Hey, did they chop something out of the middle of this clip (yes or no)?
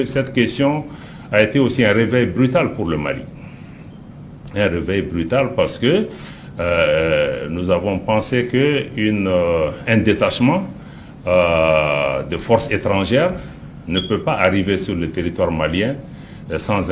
no